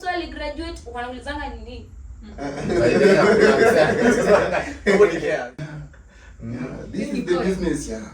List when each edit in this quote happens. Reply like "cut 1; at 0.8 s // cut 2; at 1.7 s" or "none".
cut 1; at 5.5 s